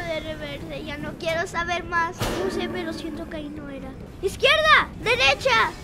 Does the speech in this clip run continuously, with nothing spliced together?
no; 1 cut; at 2.2 s

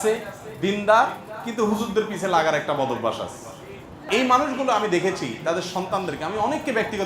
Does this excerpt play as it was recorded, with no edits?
no; 1 cut; at 4.0 s

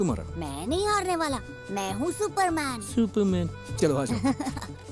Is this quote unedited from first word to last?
yes; 0 cuts

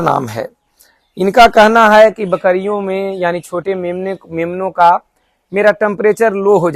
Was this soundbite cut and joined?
no; 0 cuts

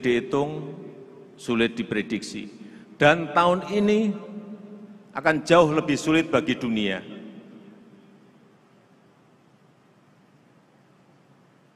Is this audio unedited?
yes; 0 cuts

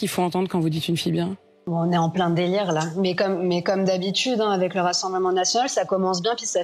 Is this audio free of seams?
no; 1 cut; at 1.5 s

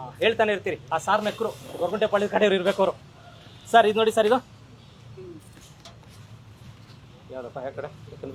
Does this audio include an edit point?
no; 0 cuts

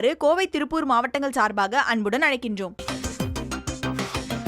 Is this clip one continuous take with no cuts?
no; 1 cut; at 2.8 s

